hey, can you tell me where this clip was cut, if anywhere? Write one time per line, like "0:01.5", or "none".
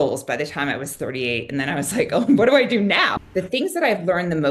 0:03.1